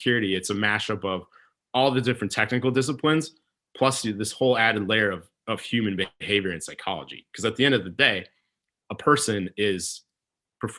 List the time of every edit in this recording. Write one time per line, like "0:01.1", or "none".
none